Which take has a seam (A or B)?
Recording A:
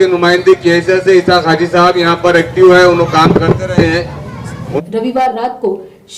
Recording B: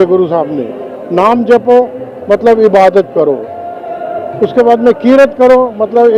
A